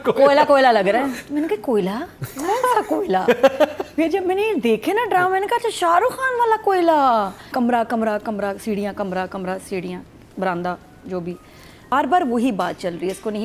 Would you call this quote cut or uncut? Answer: cut